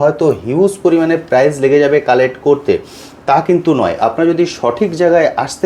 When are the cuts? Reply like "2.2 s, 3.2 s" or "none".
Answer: none